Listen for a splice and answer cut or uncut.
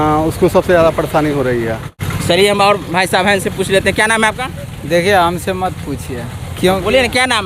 uncut